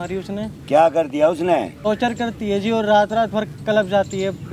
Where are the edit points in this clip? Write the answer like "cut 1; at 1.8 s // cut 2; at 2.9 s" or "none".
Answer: cut 1; at 1.7 s

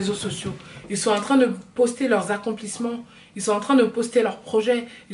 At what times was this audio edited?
none

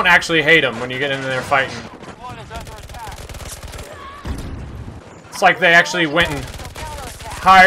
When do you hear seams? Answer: cut 1; at 2.2 s // cut 2; at 5.0 s

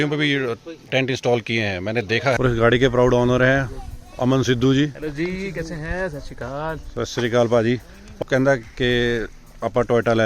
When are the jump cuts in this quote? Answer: cut 1; at 2.4 s // cut 2; at 8.2 s

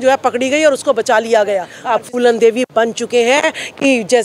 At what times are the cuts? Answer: cut 1; at 1.7 s

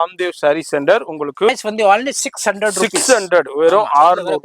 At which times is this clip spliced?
cut 1; at 1.6 s

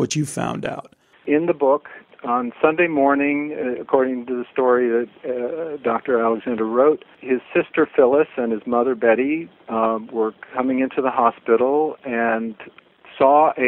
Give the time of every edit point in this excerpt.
cut 1; at 1.2 s // cut 2; at 2.0 s // cut 3; at 7.1 s

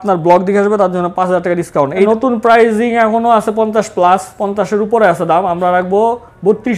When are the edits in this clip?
cut 1; at 2.1 s

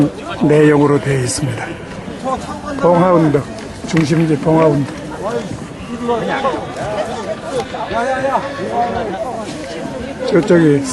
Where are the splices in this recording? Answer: cut 1; at 2.1 s

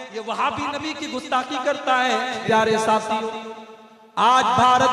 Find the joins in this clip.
cut 1; at 2.4 s

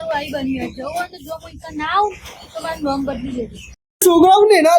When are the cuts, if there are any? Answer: cut 1; at 3.8 s

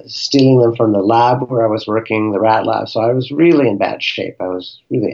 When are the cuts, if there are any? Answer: none

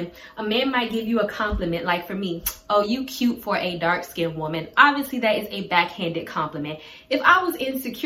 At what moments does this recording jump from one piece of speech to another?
none

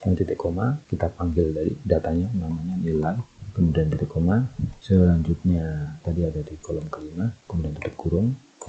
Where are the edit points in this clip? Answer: none

